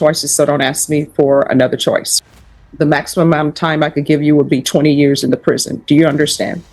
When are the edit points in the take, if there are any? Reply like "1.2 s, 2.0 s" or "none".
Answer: 2.1 s